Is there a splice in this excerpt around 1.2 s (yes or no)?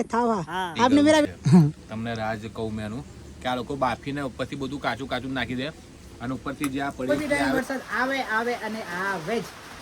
yes